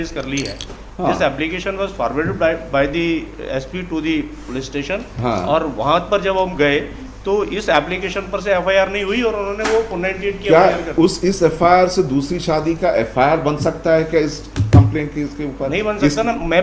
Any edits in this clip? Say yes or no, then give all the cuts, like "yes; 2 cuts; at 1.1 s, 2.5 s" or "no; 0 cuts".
no; 0 cuts